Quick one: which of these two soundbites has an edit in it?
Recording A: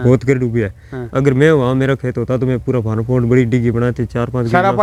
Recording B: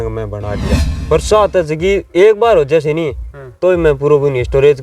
B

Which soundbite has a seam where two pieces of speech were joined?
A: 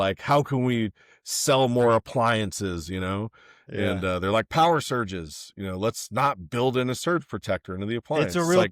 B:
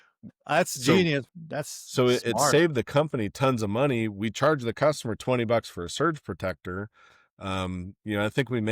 B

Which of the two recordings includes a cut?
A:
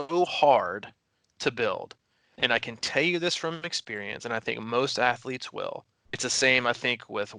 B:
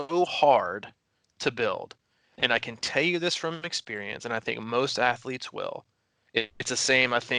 A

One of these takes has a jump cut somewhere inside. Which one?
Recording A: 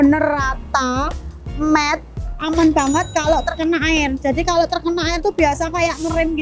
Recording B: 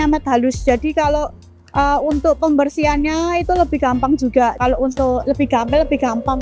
A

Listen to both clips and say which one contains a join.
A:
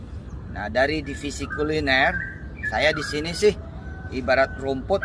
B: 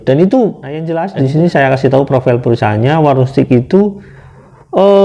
B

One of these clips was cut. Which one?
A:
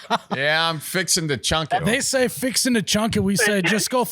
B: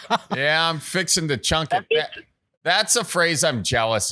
A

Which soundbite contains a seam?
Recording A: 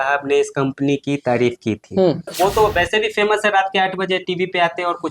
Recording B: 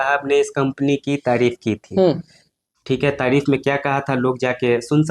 A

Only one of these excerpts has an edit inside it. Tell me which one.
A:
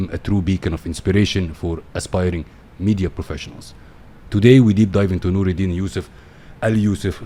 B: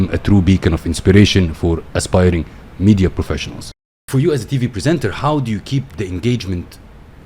B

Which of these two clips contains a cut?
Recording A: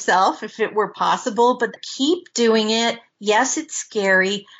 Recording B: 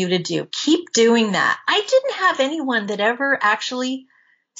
A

